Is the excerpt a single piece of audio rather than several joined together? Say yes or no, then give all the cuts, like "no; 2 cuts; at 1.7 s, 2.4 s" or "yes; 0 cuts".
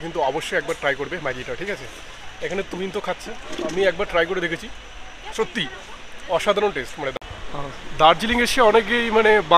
no; 1 cut; at 7.1 s